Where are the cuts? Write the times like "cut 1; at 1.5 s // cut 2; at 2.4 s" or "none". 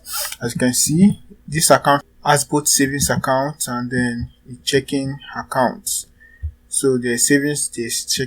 cut 1; at 2.0 s